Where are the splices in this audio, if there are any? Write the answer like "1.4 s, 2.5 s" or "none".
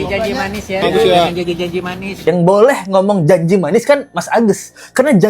2.2 s